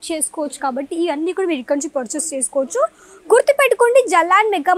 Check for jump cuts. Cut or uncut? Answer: uncut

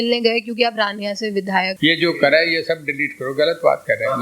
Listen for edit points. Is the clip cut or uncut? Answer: cut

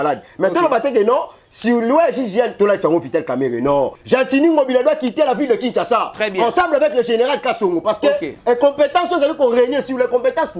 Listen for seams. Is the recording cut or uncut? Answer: cut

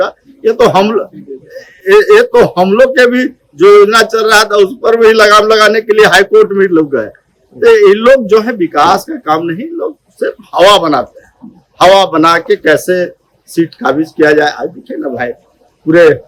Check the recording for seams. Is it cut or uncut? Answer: uncut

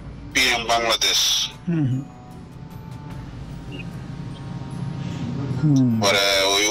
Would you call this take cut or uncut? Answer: uncut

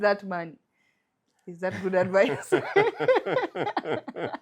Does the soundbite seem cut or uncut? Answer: uncut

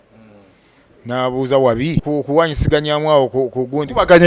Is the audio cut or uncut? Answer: cut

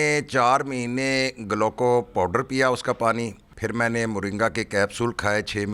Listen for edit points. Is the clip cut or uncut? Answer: cut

